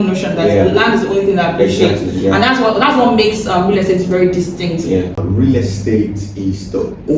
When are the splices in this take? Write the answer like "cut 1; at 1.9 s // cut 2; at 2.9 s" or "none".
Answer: cut 1; at 5.2 s